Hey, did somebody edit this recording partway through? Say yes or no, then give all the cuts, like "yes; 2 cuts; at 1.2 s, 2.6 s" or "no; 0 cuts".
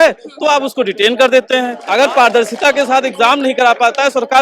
yes; 1 cut; at 1.8 s